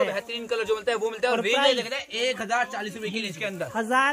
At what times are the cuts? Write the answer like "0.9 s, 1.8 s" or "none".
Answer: none

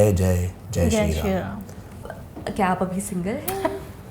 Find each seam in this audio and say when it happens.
2.0 s

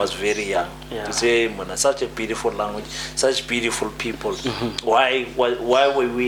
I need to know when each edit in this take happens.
none

